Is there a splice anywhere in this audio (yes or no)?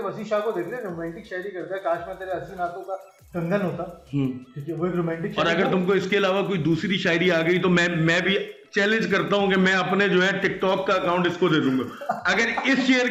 no